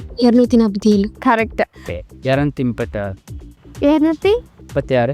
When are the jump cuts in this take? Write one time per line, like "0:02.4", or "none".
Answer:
none